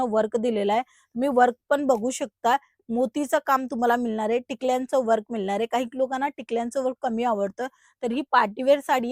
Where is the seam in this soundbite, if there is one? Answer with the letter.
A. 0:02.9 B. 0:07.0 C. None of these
C